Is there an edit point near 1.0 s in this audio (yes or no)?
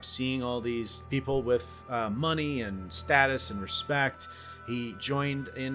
yes